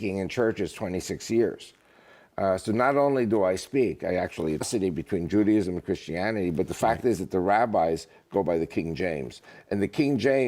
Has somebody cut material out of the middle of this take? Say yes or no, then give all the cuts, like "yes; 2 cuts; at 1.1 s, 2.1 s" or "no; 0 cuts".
no; 0 cuts